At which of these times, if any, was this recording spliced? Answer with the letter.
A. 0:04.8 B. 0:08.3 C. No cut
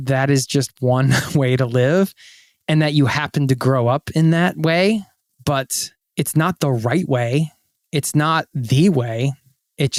C